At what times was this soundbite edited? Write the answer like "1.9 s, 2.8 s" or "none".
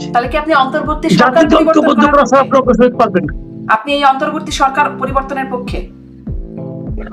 none